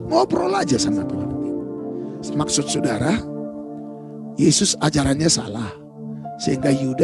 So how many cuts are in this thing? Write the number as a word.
one